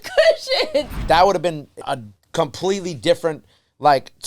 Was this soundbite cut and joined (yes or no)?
yes